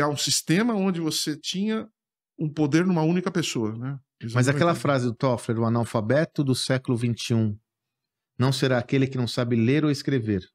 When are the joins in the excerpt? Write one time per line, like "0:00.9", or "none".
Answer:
0:04.2